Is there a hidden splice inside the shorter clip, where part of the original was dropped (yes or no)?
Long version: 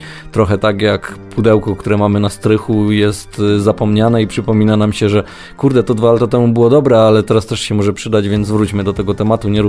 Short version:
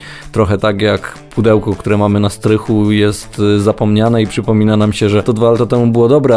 yes